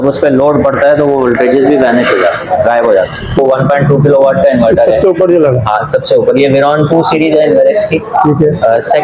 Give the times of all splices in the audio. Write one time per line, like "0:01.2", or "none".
0:03.4